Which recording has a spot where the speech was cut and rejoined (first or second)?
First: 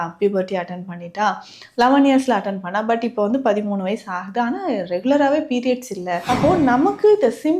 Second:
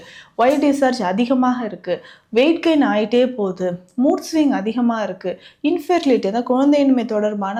first